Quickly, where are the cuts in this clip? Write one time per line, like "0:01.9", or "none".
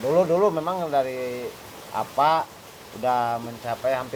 none